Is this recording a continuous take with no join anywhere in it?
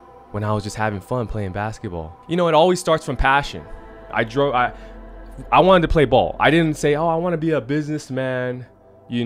no; 1 cut; at 2.1 s

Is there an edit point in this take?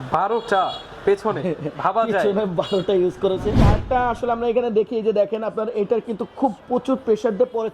yes; 1 cut; at 3.7 s

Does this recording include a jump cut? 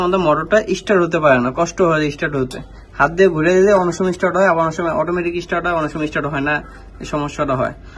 no; 0 cuts

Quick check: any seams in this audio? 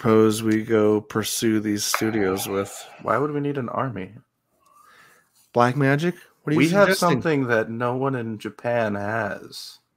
no; 0 cuts

